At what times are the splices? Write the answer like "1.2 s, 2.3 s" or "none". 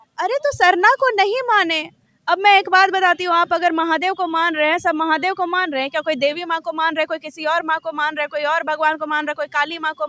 none